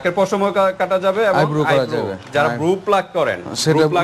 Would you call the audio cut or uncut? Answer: uncut